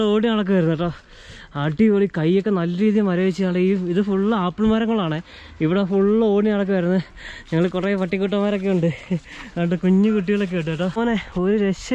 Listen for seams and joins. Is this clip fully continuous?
no; 1 cut; at 11.0 s

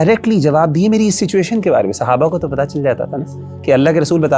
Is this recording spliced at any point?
no; 0 cuts

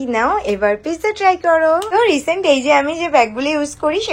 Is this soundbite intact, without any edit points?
no; 1 cut; at 1.9 s

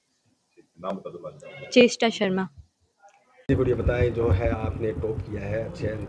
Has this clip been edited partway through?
yes; 1 cut; at 3.5 s

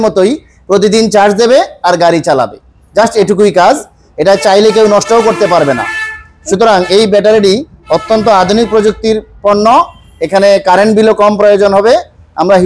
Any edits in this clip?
no; 0 cuts

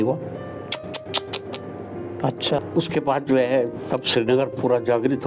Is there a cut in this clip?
yes; 1 cut; at 2.7 s

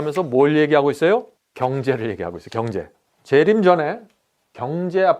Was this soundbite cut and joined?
yes; 2 cuts; at 1.4 s, 3.1 s

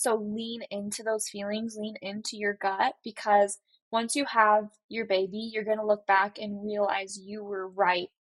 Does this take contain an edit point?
no; 0 cuts

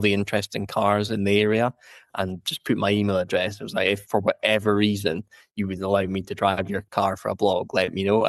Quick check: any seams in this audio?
no; 0 cuts

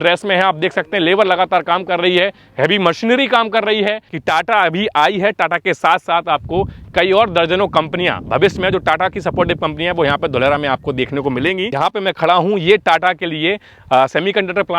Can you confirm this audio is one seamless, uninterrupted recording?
no; 2 cuts; at 4.1 s, 11.7 s

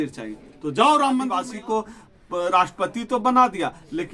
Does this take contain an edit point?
yes; 1 cut; at 1.4 s

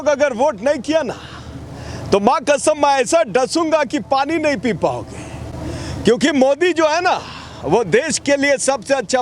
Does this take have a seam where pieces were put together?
no; 0 cuts

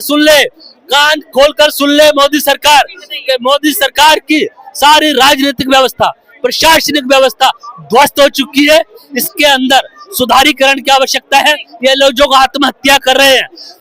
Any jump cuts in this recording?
no; 0 cuts

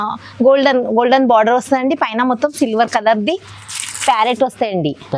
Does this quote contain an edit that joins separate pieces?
no; 0 cuts

